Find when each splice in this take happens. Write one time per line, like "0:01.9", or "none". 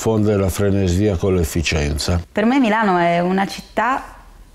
0:02.2